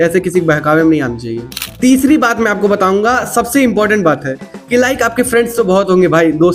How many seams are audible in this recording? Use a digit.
0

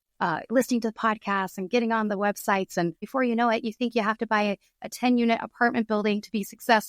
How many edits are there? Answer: 1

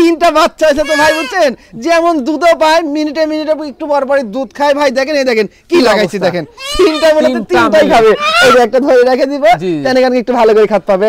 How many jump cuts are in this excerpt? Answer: 0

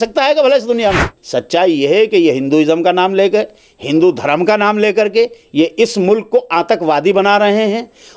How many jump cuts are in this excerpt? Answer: 1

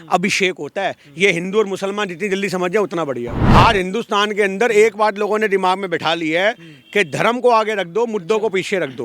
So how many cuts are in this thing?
1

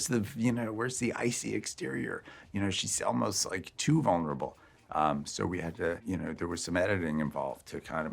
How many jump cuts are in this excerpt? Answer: 0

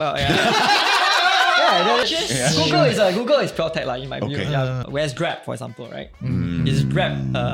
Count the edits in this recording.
2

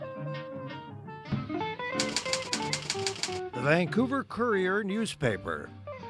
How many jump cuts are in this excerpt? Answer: 1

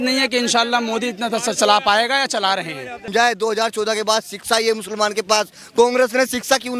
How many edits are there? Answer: 1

